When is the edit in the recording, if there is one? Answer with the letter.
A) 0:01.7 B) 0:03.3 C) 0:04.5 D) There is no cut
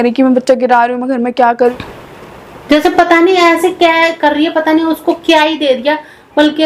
A